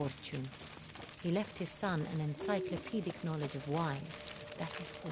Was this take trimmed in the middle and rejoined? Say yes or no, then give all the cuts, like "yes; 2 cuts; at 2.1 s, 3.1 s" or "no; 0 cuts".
no; 0 cuts